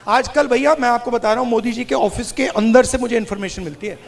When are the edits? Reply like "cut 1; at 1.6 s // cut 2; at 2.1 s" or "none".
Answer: none